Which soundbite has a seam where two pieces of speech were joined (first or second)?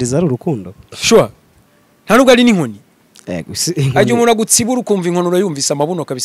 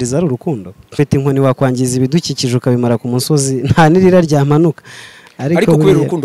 second